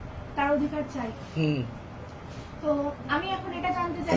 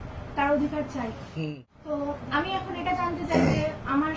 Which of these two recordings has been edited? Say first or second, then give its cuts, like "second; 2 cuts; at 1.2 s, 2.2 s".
second; 1 cut; at 1.3 s